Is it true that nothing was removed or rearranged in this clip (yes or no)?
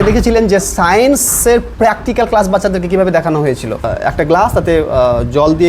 no